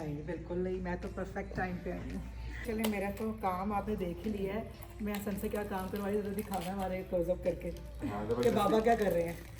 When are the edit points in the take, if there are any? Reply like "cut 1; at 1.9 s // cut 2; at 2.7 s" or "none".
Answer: cut 1; at 2.6 s